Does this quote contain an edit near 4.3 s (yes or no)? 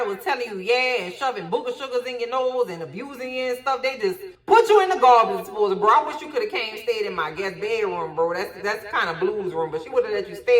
no